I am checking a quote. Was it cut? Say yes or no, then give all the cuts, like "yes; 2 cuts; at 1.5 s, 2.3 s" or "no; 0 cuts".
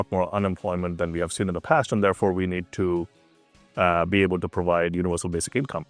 no; 0 cuts